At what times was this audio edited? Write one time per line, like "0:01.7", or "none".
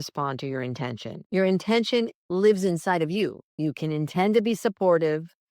0:01.1
0:02.2
0:03.5